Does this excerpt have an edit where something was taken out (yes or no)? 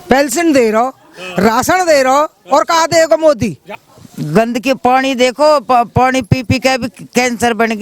yes